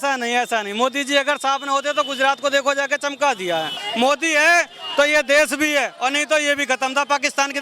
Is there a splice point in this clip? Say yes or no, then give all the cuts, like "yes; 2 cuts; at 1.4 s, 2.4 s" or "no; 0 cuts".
yes; 1 cut; at 3.8 s